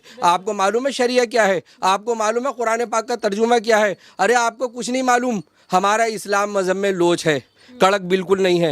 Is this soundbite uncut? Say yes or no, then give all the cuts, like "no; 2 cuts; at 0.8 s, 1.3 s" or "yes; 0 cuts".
yes; 0 cuts